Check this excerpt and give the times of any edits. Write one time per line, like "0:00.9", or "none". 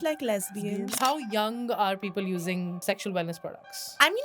0:01.0
0:02.8

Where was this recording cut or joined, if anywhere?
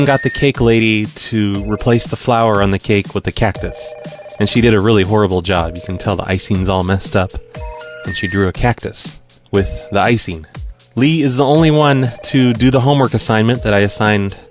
0:13.0

